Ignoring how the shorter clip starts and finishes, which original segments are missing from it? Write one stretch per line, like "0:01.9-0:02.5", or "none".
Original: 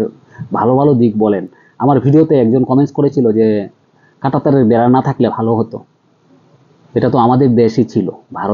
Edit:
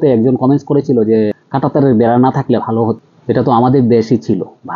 0:03.7-0:04.1
0:05.8-0:06.8